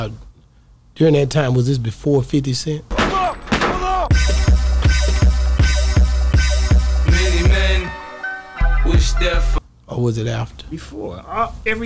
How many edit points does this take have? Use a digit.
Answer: 0